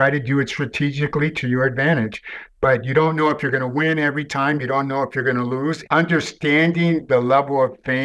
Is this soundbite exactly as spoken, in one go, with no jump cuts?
no; 1 cut; at 5.8 s

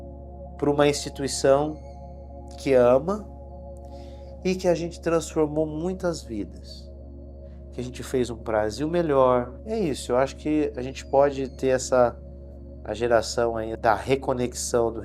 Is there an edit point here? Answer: yes; 2 cuts; at 9.6 s, 13.7 s

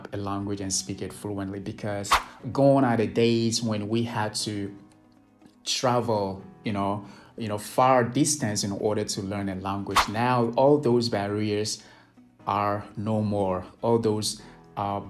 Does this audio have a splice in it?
no; 0 cuts

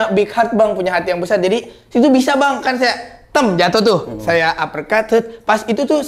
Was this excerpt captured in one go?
yes; 0 cuts

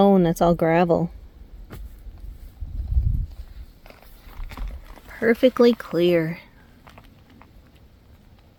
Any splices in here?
no; 0 cuts

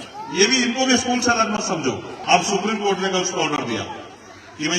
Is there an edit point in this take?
yes; 1 cut; at 2.1 s

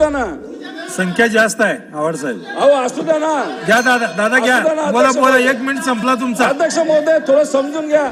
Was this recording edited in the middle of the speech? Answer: no; 0 cuts

